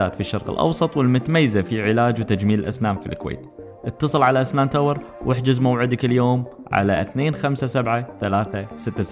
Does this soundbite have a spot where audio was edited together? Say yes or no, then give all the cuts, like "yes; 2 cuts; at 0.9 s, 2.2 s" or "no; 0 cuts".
no; 0 cuts